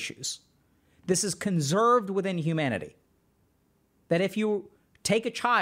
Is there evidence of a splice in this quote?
no; 0 cuts

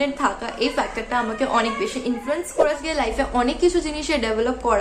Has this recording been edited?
yes; 1 cut; at 2.8 s

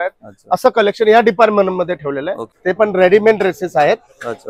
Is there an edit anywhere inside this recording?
yes; 1 cut; at 2.6 s

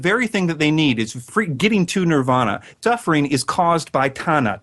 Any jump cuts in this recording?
yes; 2 cuts; at 1.3 s, 2.7 s

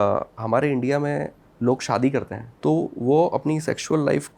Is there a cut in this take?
yes; 2 cuts; at 1.4 s, 2.4 s

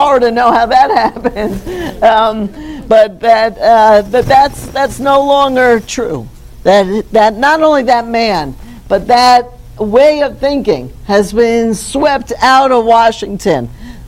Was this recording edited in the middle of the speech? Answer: yes; 1 cut; at 10.1 s

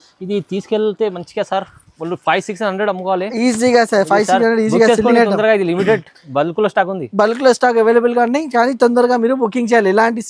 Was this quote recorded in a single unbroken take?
yes; 0 cuts

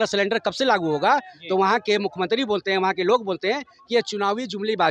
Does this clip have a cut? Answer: no; 0 cuts

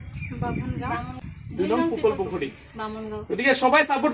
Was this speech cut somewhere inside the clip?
yes; 1 cut; at 1.2 s

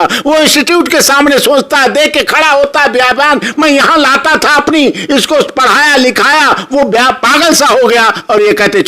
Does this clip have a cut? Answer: no; 0 cuts

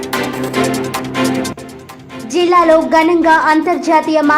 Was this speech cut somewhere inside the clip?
yes; 1 cut; at 1.5 s

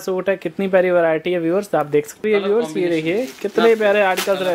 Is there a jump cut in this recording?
yes; 1 cut; at 2.2 s

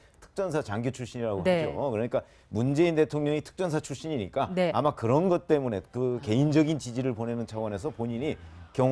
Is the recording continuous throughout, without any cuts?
yes; 0 cuts

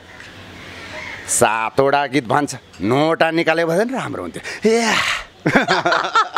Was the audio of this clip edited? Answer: no; 0 cuts

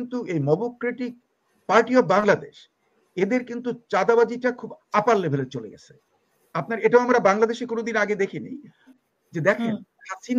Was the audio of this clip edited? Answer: yes; 1 cut; at 9.0 s

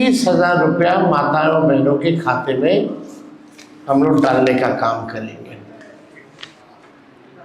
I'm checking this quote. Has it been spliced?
no; 0 cuts

